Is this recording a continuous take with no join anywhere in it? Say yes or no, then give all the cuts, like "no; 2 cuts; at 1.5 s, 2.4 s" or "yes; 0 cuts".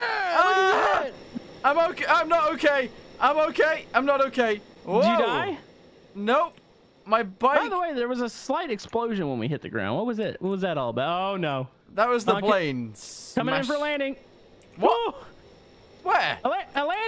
yes; 0 cuts